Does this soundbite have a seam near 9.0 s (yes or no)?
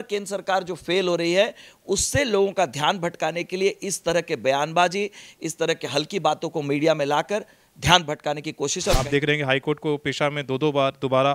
yes